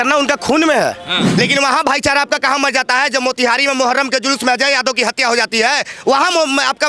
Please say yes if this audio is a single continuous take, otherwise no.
no